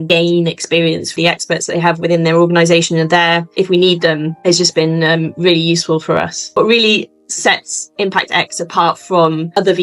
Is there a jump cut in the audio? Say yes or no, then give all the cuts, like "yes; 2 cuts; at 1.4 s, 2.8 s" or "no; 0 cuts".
yes; 3 cuts; at 1.2 s, 3.5 s, 6.5 s